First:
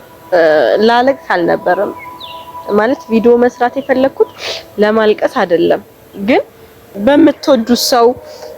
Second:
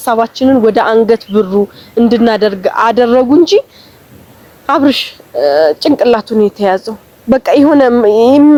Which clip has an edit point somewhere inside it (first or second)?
first